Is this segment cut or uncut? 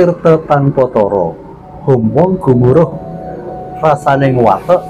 uncut